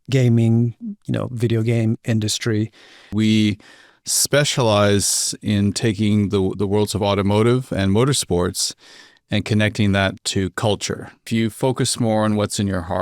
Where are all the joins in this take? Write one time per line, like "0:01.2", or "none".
0:03.1
0:11.3